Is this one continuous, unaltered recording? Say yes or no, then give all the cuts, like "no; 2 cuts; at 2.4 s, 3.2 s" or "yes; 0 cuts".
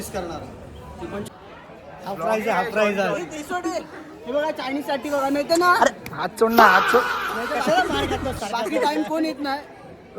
no; 1 cut; at 0.9 s